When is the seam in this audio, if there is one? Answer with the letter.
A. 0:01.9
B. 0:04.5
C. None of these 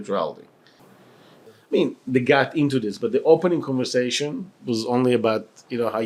C